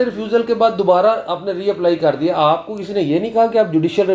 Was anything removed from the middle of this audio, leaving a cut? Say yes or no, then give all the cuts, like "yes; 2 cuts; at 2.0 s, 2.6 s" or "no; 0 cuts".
no; 0 cuts